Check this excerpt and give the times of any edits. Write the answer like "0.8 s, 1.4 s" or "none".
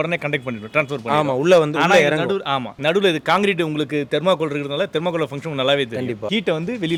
none